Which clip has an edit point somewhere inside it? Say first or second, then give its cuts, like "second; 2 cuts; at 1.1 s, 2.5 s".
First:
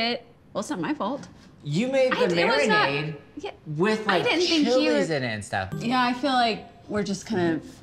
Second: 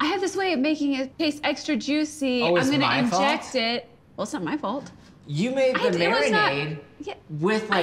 first; 1 cut; at 5.7 s